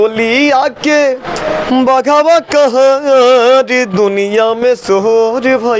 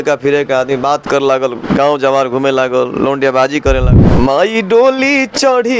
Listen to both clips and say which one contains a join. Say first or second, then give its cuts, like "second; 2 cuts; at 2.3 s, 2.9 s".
second; 1 cut; at 3.9 s